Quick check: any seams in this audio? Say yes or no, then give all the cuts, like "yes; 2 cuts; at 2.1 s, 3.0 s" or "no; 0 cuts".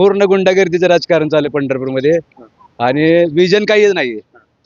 no; 0 cuts